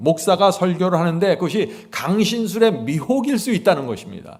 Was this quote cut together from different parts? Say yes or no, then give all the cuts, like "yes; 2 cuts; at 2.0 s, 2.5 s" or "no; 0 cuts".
no; 0 cuts